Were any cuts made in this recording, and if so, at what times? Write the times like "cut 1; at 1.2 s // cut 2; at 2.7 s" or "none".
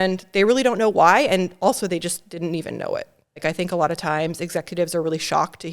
cut 1; at 3.4 s